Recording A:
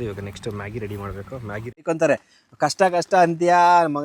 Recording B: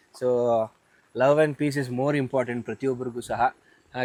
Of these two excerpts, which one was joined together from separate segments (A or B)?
A